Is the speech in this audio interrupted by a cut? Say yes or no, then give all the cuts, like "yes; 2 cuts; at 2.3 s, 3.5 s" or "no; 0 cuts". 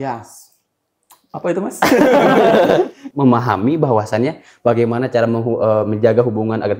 yes; 1 cut; at 3.0 s